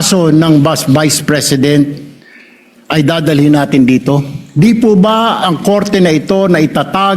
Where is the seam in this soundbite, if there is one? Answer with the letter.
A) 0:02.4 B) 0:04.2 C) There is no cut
C